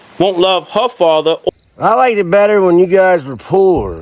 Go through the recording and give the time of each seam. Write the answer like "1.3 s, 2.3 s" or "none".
1.4 s